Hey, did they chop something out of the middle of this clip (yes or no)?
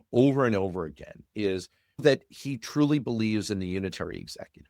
yes